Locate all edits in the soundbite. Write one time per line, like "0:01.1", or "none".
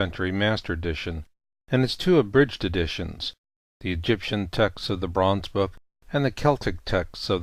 0:03.1